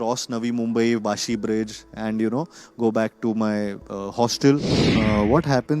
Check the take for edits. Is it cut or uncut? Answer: cut